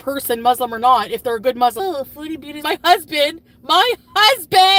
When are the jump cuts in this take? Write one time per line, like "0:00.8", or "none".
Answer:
none